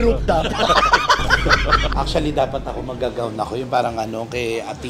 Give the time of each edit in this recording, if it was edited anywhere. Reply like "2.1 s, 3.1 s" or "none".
1.9 s